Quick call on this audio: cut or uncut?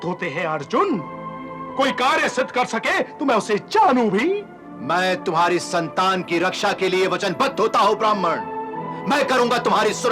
uncut